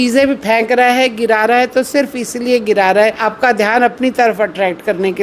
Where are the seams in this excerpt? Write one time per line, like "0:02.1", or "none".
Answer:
0:03.3